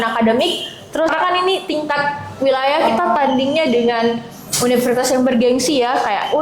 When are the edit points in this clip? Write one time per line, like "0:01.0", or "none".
0:01.1